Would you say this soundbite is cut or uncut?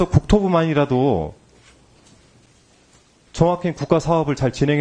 uncut